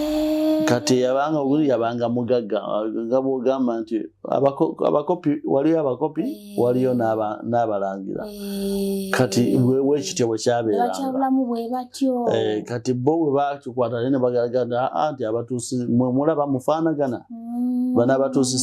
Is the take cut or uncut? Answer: uncut